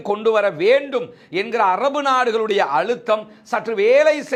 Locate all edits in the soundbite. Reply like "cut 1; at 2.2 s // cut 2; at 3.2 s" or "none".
none